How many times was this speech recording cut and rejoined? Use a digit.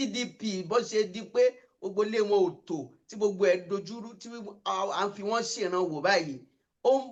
0